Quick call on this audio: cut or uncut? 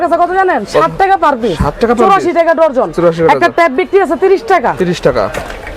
uncut